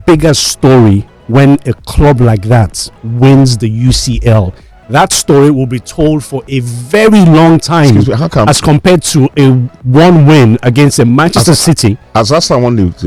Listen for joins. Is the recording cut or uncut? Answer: uncut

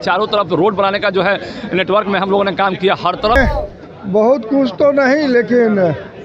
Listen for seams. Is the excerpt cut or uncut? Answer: cut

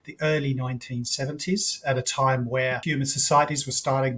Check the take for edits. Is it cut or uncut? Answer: cut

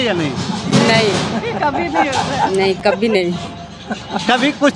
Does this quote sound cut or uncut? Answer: uncut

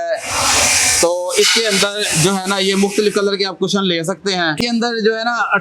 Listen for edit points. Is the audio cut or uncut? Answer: cut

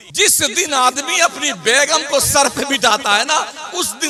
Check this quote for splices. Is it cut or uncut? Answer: uncut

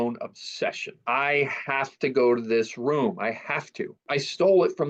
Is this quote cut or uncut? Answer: cut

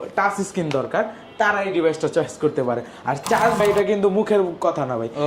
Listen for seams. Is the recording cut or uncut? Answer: cut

